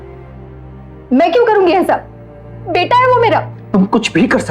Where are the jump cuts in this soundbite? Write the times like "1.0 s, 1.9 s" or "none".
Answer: 3.6 s